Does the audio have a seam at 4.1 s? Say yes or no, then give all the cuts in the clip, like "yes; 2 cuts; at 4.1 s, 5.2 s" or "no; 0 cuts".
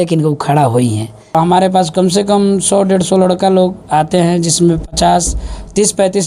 no; 1 cut; at 1.3 s